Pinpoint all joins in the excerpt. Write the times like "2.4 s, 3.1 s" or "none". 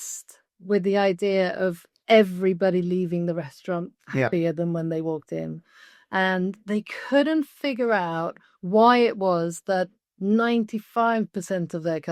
1.9 s